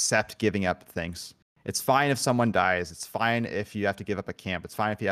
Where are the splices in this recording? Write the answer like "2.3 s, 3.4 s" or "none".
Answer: none